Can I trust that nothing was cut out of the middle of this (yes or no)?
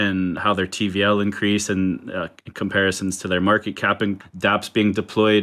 no